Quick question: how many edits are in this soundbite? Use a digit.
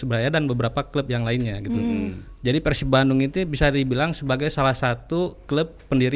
0